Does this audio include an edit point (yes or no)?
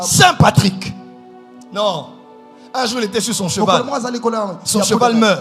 no